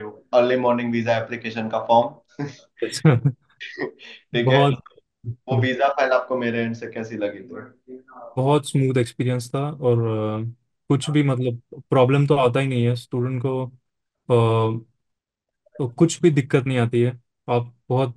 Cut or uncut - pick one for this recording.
uncut